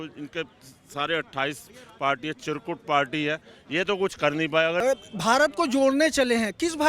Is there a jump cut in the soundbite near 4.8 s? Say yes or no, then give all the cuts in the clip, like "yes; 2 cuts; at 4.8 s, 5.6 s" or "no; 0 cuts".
yes; 1 cut; at 4.8 s